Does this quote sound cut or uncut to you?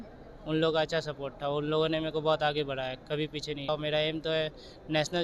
cut